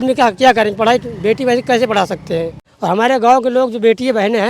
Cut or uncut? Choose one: cut